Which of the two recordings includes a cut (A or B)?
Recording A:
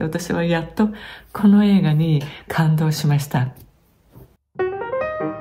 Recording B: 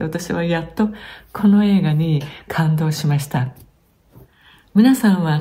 A